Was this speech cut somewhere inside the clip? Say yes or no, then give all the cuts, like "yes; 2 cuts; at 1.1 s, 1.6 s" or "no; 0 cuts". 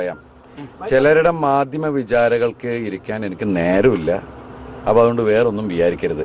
no; 0 cuts